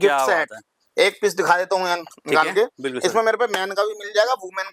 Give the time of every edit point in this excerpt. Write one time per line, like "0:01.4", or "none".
none

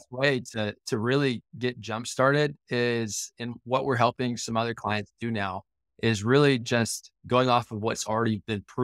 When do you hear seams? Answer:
none

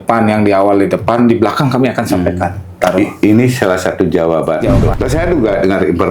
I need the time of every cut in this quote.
0:04.9

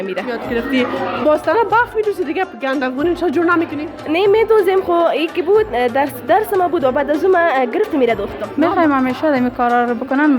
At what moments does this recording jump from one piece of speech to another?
0:08.4

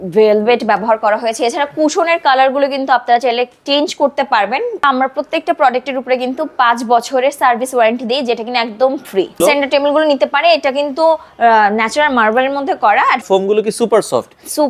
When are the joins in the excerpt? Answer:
0:04.8
0:09.4
0:13.2

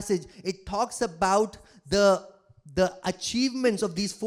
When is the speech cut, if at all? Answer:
none

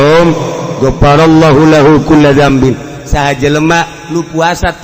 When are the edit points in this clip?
none

